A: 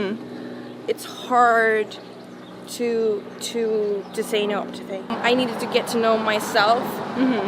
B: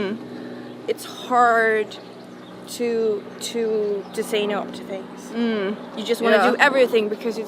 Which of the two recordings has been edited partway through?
A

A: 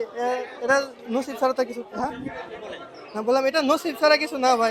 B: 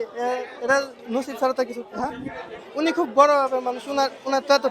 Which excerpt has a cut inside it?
B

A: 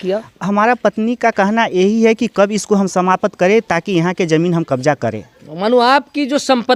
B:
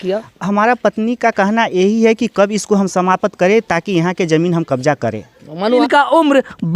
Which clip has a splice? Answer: B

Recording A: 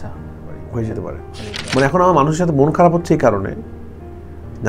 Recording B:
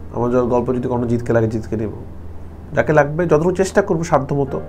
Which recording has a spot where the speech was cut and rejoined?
A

